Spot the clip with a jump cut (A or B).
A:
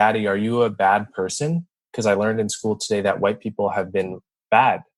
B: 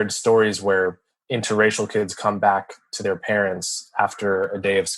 B